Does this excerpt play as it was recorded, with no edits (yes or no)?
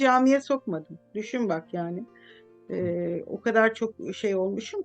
yes